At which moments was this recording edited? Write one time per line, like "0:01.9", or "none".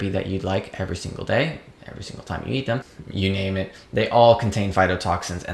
0:03.0